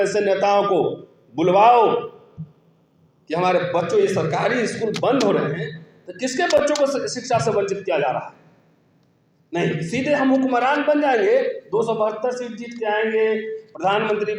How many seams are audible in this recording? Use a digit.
0